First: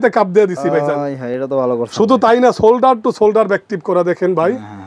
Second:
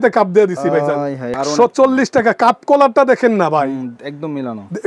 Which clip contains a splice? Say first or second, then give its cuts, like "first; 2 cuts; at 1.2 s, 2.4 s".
second; 1 cut; at 1.4 s